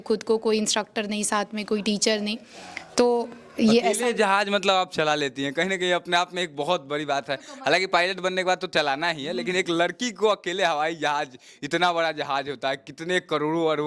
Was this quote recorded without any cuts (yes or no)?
yes